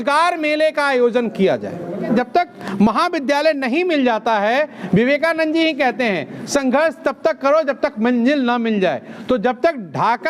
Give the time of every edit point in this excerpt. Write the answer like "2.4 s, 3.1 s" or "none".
2.0 s